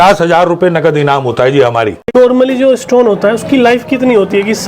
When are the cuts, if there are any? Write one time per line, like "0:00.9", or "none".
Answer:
0:02.1